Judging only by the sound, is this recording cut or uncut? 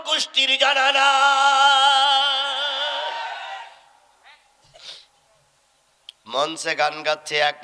uncut